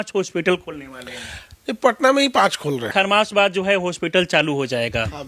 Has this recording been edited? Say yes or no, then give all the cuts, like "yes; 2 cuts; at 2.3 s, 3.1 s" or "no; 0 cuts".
yes; 1 cut; at 2.9 s